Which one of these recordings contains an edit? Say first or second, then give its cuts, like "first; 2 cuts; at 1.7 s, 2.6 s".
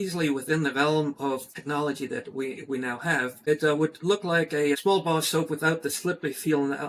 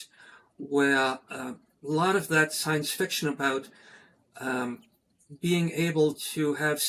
first; 3 cuts; at 1.5 s, 3.4 s, 4.8 s